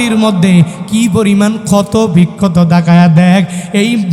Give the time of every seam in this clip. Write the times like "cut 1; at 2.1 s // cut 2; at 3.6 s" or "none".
none